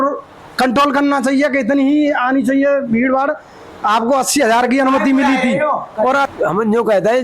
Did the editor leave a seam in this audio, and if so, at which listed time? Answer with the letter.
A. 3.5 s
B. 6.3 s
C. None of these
B